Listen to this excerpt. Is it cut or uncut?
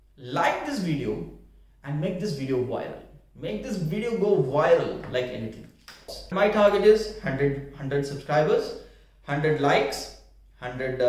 cut